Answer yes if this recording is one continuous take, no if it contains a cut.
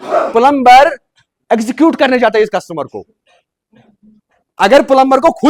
yes